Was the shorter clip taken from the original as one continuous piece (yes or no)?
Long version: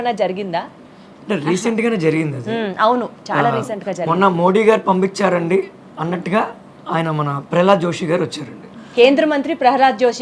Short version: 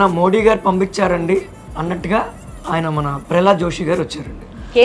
yes